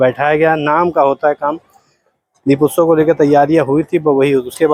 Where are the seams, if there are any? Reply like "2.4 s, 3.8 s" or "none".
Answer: none